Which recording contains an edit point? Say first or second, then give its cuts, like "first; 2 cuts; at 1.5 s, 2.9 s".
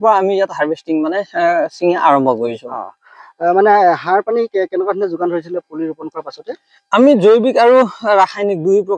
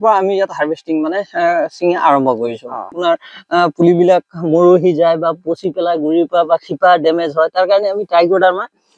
second; 1 cut; at 2.9 s